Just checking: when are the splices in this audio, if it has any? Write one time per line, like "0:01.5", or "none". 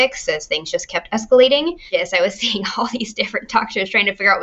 0:01.9